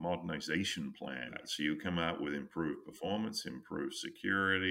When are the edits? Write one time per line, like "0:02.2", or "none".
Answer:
0:01.4

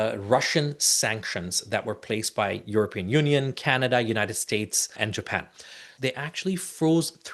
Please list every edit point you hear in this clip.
0:04.8
0:05.9

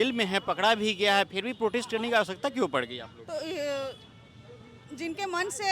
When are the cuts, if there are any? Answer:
none

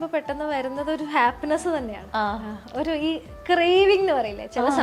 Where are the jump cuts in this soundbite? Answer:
none

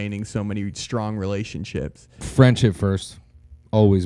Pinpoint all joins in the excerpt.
none

